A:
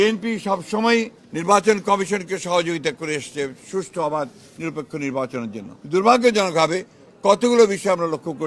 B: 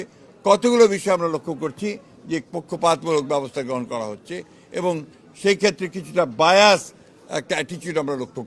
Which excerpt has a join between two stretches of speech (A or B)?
A